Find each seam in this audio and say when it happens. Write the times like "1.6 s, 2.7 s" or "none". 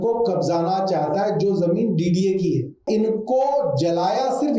2.9 s